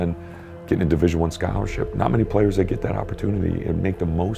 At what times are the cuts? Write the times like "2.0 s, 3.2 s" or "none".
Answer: 1.8 s